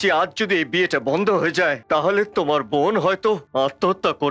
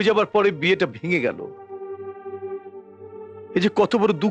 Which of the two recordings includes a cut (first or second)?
first